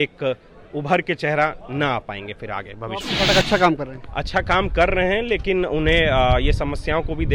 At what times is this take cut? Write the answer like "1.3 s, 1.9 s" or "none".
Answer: 3.1 s